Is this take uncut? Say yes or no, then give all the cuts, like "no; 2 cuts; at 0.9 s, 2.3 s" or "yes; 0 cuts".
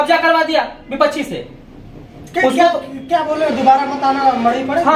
yes; 0 cuts